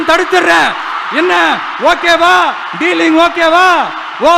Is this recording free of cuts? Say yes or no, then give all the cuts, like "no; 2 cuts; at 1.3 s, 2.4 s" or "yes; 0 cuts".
yes; 0 cuts